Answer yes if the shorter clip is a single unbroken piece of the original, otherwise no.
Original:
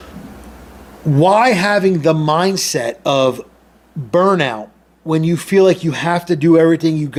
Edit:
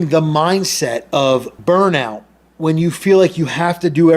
no